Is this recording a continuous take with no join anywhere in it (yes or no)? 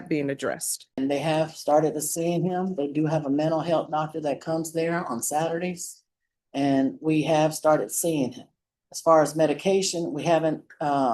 no